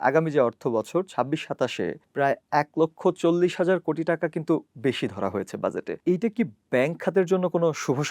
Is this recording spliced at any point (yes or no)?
yes